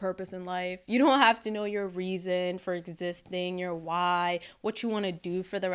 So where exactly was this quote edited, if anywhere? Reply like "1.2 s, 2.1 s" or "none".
none